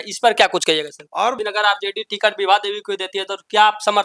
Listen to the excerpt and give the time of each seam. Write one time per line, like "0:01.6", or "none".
0:01.4